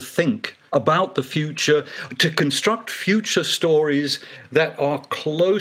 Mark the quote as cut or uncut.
uncut